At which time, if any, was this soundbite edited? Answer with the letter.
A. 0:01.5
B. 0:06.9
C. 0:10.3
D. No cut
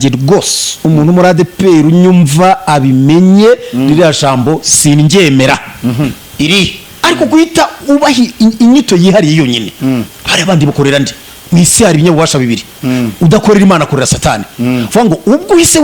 B